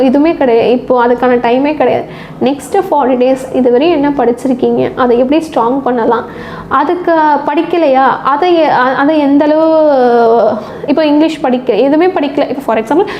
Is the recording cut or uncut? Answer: uncut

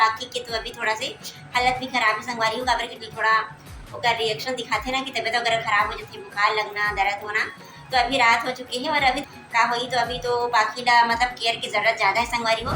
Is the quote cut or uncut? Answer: cut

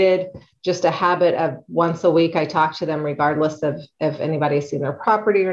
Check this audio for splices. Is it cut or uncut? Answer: uncut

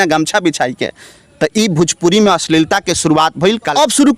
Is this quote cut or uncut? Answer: uncut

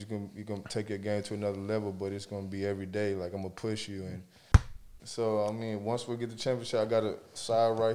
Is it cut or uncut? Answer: cut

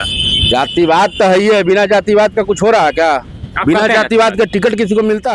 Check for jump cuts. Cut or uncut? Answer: uncut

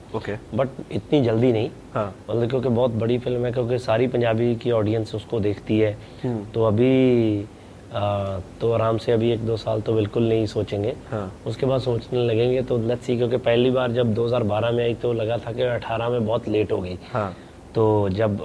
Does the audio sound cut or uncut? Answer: uncut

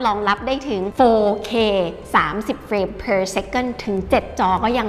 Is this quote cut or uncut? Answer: uncut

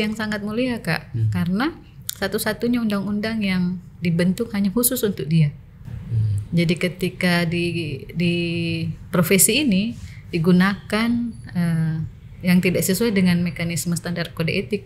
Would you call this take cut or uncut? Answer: uncut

